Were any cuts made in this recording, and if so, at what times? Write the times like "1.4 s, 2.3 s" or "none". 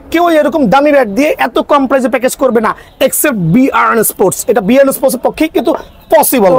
none